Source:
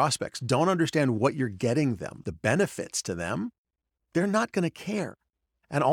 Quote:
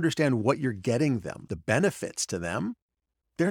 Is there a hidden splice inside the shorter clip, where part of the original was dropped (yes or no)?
no